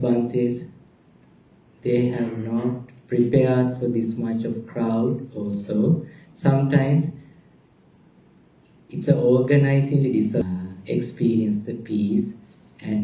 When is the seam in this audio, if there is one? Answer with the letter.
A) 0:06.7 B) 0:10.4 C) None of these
B